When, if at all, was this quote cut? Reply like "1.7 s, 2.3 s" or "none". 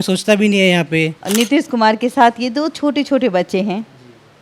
1.2 s